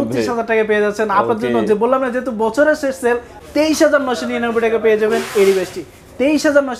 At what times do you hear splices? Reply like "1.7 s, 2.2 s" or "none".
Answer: 3.4 s